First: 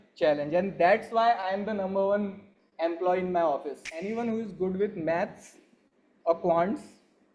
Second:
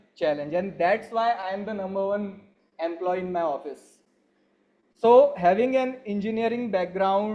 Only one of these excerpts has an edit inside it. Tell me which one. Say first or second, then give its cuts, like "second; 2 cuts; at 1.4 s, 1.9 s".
first; 1 cut; at 3.9 s